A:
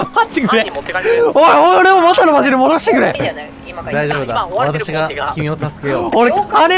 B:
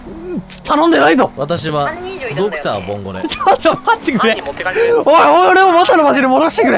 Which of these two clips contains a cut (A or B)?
B